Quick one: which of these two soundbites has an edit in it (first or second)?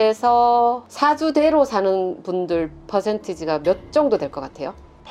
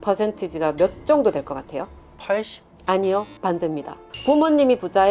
second